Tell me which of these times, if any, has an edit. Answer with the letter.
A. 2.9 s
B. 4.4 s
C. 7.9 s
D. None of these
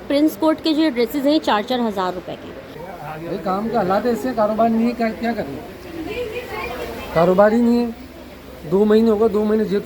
A